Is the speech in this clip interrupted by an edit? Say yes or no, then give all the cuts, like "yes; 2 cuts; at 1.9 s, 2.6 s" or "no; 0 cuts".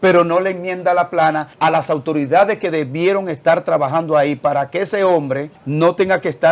yes; 2 cuts; at 1.5 s, 5.6 s